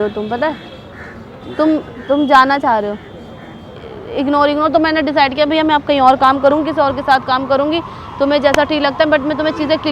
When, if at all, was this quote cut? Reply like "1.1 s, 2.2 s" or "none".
3.8 s